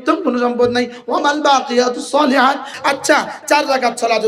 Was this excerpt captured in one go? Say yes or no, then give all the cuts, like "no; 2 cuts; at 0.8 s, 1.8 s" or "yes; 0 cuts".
no; 1 cut; at 2.7 s